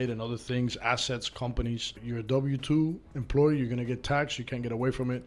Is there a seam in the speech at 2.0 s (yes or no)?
yes